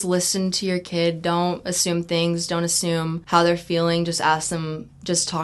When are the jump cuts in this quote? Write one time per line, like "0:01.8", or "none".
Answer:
0:03.2